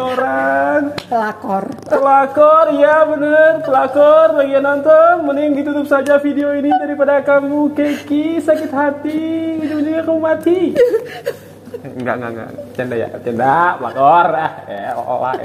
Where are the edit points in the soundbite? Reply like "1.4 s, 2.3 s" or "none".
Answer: none